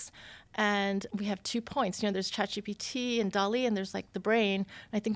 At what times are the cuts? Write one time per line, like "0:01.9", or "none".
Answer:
0:01.1